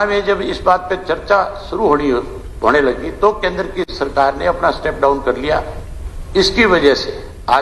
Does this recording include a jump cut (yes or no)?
no